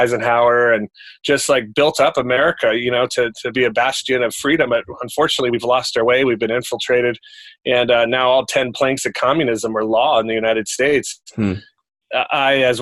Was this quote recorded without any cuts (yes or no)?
yes